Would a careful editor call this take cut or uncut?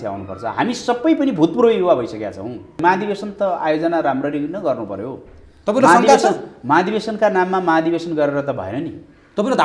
cut